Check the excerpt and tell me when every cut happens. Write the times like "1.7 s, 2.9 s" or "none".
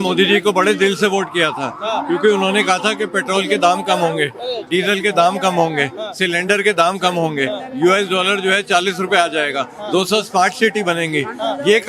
none